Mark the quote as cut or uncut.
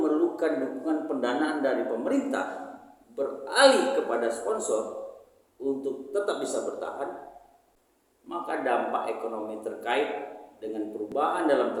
uncut